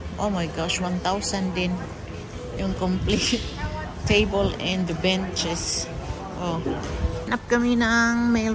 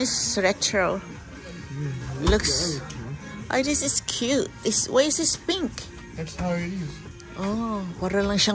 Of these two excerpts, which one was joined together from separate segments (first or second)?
first